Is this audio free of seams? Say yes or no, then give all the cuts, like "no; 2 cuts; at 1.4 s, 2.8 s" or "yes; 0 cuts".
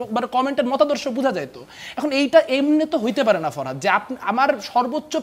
yes; 0 cuts